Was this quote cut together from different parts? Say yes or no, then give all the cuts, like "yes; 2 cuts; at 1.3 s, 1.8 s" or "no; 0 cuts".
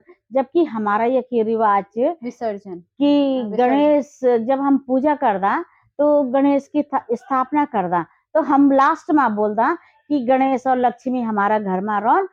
no; 0 cuts